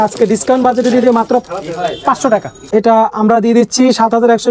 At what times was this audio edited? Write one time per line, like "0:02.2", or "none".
0:02.5